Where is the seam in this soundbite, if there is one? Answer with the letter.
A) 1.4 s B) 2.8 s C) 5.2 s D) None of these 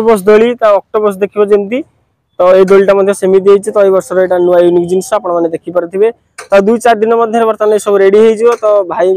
D